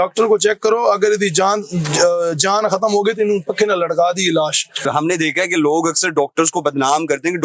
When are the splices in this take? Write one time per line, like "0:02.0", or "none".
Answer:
0:04.8